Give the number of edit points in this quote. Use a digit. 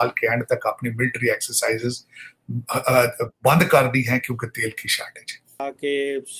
1